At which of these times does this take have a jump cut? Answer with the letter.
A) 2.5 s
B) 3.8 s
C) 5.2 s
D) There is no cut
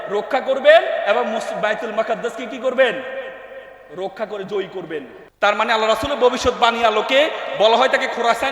C